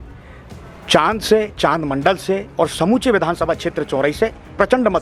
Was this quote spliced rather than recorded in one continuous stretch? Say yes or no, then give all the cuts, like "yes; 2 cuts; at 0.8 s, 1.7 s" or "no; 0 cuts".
no; 0 cuts